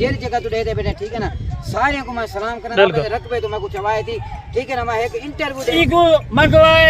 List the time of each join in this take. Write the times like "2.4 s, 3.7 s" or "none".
2.7 s, 5.7 s